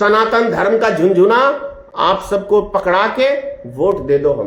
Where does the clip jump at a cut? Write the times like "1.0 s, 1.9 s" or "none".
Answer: none